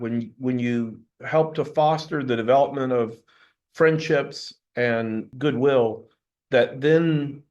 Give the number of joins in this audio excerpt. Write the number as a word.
one